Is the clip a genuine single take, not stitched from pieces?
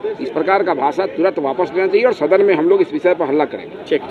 yes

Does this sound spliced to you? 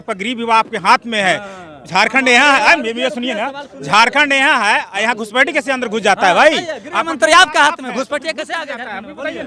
no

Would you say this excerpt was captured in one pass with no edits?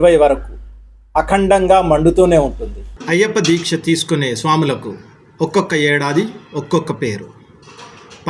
no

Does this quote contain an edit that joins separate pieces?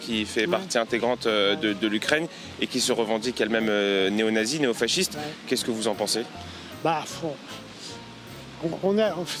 no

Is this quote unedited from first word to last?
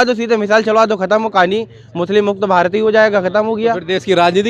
yes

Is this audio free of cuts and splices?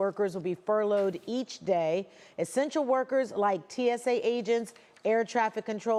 yes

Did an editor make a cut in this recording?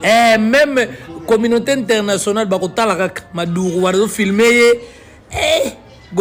no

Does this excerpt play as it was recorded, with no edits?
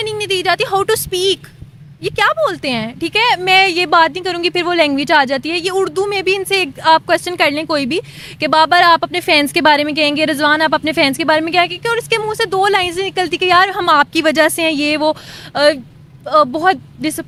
yes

